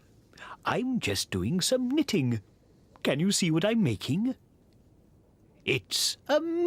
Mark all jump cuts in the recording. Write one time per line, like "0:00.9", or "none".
none